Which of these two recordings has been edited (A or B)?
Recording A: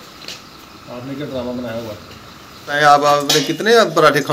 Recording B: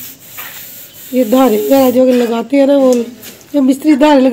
A